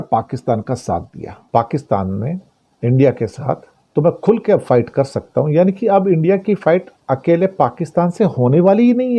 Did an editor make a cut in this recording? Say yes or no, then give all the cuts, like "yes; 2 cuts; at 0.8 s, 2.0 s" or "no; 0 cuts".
yes; 2 cuts; at 1.4 s, 3.7 s